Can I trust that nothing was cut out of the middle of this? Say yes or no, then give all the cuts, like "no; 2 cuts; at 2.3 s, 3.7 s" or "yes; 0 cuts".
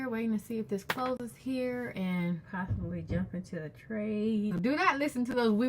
no; 1 cut; at 4.6 s